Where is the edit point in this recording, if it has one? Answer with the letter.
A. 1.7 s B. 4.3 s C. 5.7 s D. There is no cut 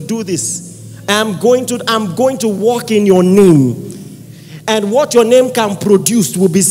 D